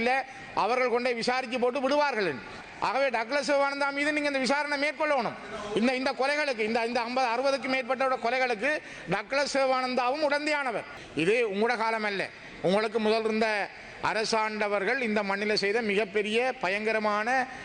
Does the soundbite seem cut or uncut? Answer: cut